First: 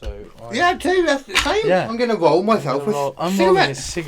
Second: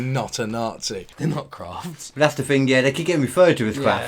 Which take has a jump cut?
second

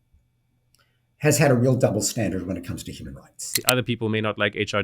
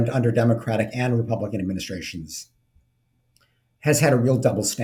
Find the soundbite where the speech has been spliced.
first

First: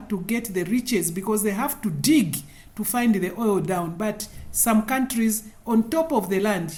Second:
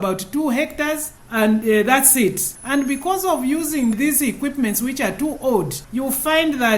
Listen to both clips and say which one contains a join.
second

